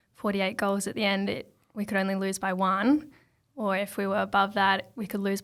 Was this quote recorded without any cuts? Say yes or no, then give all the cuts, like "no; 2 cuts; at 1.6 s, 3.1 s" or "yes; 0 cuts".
yes; 0 cuts